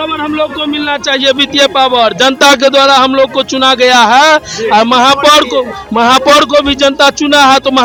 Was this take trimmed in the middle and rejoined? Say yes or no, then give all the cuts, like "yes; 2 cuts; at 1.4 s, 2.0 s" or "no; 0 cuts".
no; 0 cuts